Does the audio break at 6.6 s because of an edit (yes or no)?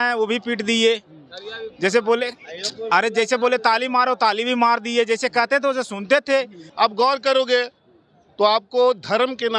yes